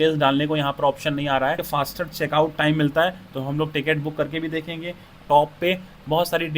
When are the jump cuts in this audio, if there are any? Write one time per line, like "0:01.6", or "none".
0:01.6
0:05.2

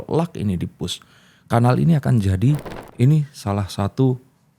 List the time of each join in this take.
0:02.8

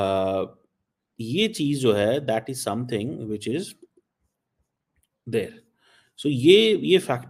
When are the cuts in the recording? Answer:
none

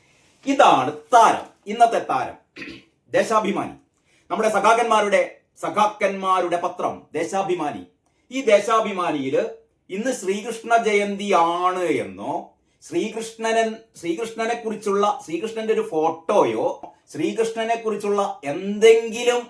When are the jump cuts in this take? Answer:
0:17.0

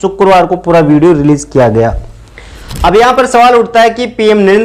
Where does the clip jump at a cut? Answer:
none

